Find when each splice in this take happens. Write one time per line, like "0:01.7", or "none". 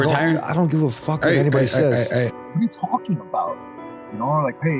0:02.4